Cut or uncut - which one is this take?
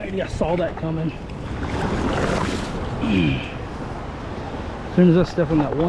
uncut